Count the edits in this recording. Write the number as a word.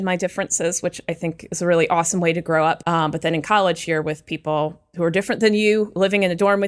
one